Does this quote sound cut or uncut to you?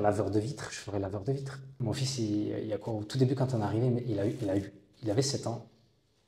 cut